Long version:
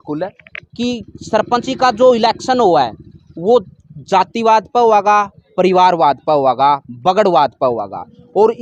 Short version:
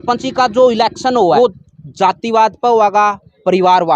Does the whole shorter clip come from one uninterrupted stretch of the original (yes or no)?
no